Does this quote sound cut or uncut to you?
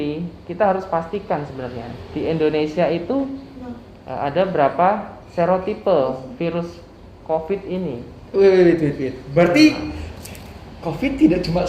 uncut